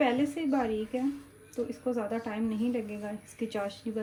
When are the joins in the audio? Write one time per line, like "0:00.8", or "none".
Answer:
none